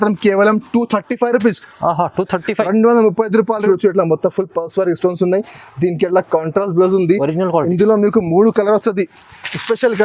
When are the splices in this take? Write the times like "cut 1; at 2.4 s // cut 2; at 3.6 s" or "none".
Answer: cut 1; at 3.6 s